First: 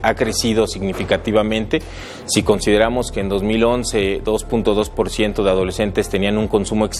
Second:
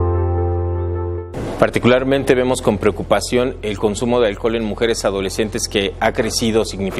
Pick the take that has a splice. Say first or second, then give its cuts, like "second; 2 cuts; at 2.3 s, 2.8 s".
second; 1 cut; at 1.2 s